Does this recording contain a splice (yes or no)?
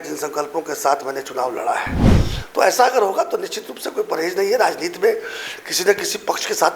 yes